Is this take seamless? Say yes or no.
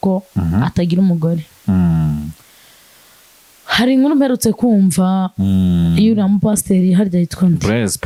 yes